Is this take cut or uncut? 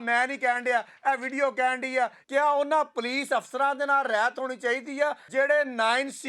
cut